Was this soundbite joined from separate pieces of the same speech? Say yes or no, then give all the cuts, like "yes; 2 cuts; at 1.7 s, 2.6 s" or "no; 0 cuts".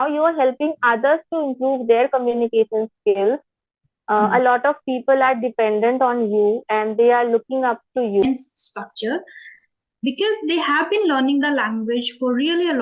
yes; 1 cut; at 8.2 s